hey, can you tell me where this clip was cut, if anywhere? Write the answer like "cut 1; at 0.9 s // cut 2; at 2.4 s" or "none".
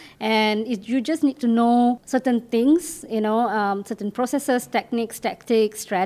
cut 1; at 2.0 s